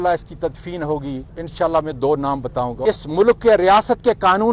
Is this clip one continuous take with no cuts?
no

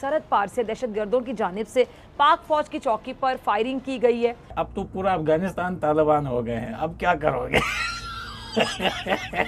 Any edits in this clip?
yes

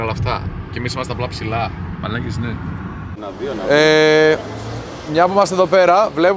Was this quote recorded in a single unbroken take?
no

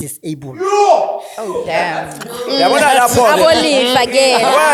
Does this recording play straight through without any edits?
yes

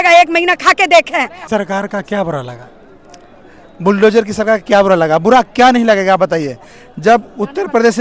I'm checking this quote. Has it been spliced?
yes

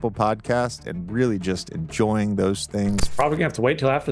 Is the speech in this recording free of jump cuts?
no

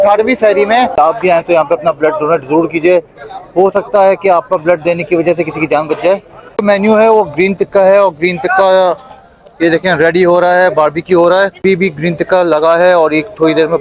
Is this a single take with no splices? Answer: no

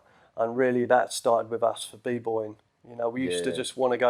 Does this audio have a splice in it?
no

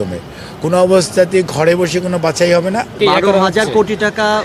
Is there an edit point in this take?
yes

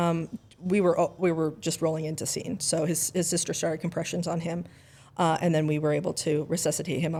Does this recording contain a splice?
no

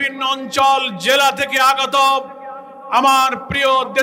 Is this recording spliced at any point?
no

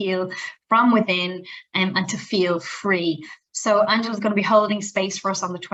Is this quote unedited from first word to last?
yes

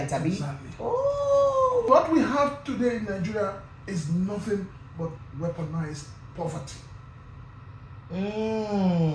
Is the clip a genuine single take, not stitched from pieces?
no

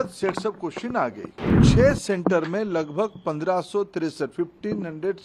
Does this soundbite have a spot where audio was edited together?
yes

